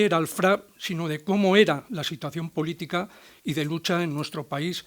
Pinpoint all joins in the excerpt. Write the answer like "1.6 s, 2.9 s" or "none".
1.1 s